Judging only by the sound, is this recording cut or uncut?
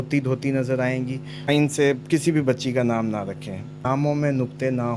cut